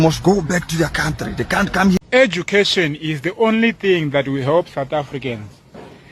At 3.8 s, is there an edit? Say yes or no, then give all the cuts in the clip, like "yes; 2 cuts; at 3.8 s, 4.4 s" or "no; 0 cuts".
no; 1 cut; at 2.0 s